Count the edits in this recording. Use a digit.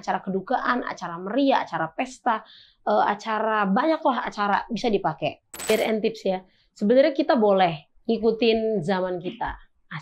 1